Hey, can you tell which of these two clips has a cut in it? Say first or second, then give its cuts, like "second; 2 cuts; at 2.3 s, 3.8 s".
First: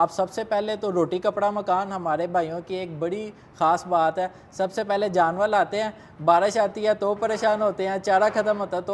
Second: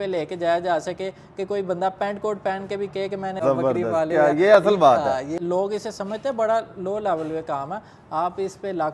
second; 2 cuts; at 3.3 s, 5.1 s